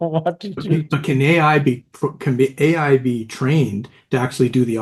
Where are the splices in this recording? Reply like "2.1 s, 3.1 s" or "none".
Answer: none